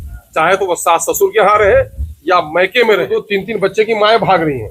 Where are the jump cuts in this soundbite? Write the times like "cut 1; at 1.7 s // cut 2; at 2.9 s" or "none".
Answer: cut 1; at 3.2 s